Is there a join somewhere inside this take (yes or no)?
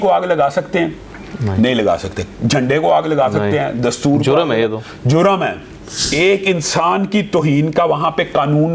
yes